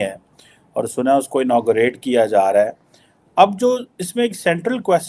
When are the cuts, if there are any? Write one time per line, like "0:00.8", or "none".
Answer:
none